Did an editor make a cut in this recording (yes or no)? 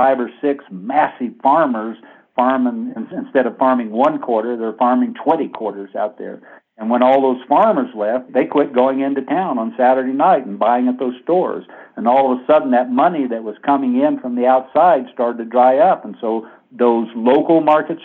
no